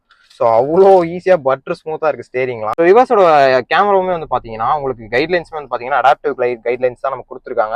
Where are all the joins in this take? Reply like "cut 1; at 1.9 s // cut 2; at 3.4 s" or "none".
cut 1; at 2.8 s